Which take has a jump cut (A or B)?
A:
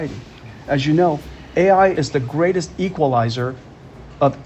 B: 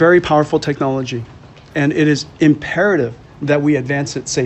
A